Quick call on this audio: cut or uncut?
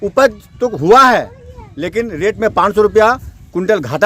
uncut